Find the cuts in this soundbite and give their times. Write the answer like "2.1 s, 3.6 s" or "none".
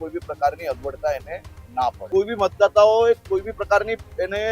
2.0 s

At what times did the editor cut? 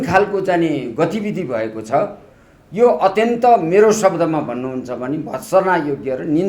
none

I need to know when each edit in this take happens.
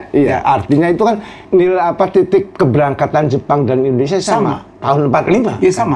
1.3 s, 4.7 s

